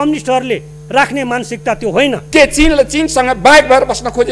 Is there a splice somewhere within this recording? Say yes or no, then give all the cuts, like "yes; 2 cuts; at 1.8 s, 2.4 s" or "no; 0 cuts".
yes; 1 cut; at 2.2 s